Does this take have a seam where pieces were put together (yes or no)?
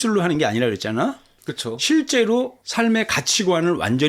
no